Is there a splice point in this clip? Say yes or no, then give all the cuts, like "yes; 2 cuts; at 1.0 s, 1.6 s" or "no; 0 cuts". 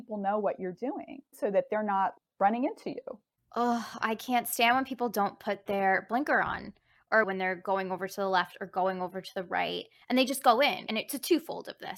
no; 0 cuts